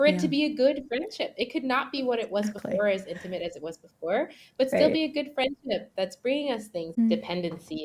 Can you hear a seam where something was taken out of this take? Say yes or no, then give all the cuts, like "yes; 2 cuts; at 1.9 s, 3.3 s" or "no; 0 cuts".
yes; 1 cut; at 6.9 s